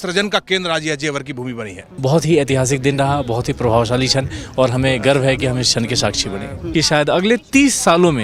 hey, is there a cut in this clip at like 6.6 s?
yes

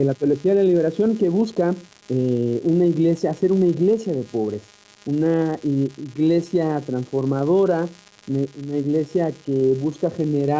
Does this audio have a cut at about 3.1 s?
no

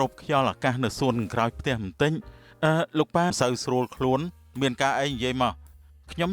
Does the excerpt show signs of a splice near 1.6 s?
no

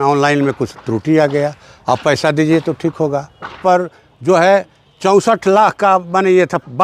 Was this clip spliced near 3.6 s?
yes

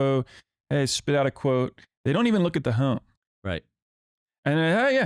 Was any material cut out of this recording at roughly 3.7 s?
no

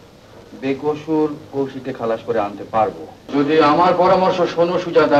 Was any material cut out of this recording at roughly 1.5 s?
no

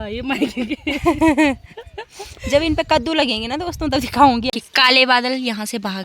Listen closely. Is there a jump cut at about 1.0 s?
no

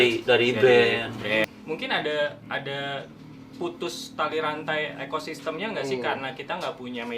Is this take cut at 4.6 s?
no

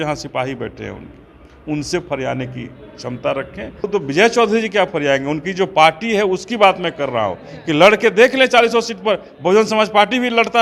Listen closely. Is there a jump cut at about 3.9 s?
yes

